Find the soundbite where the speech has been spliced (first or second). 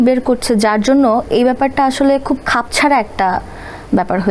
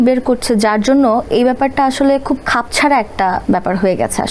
second